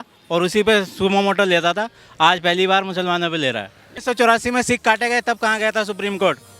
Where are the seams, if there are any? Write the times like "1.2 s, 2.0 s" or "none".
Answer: 3.9 s